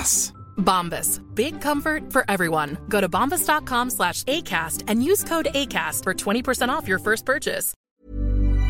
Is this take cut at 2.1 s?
no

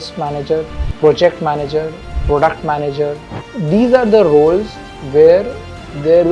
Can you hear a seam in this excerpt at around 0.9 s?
no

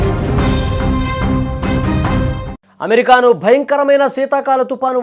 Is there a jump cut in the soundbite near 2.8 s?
no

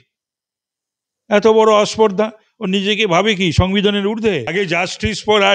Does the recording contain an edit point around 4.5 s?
yes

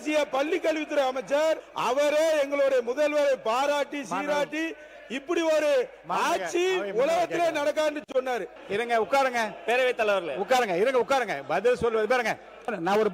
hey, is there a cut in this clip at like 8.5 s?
yes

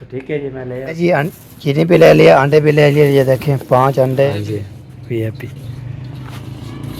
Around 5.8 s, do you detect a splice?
no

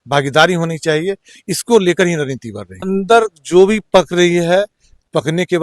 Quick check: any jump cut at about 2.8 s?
yes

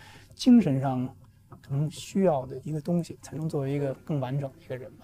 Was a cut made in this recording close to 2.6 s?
yes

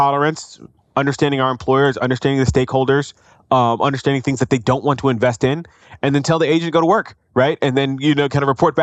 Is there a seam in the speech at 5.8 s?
no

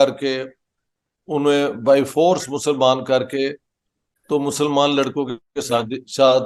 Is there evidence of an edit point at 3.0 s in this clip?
no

